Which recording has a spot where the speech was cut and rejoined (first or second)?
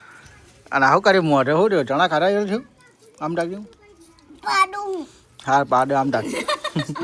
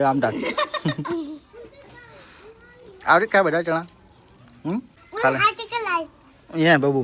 second